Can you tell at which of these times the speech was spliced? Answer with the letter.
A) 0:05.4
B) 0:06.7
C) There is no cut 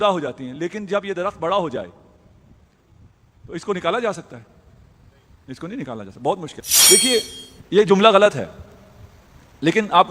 B